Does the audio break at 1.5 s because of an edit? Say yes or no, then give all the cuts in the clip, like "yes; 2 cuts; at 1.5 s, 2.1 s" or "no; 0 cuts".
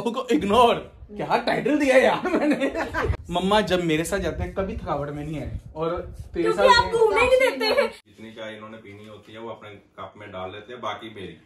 no; 2 cuts; at 3.2 s, 8.0 s